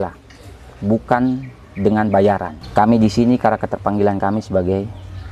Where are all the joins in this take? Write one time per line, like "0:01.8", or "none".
0:02.6